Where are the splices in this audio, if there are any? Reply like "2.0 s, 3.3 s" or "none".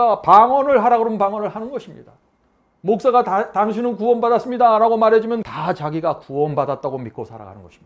5.5 s